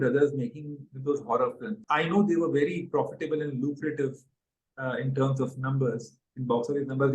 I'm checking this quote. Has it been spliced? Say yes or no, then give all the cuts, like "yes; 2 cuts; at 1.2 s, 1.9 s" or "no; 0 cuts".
yes; 1 cut; at 1.8 s